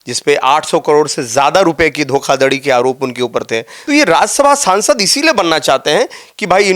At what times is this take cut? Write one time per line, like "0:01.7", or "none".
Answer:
0:03.7